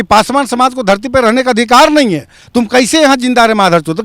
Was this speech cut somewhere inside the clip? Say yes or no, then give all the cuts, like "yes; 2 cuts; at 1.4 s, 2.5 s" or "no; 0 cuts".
no; 0 cuts